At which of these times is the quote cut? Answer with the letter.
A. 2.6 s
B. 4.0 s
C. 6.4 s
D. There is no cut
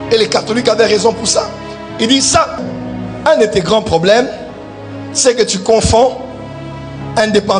A